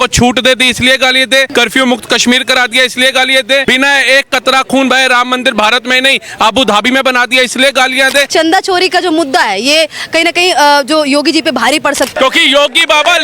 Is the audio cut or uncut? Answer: cut